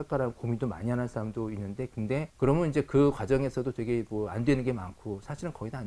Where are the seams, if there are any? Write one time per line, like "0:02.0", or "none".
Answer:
0:02.3